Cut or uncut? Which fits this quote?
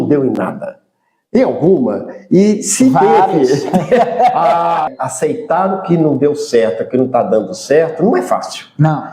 cut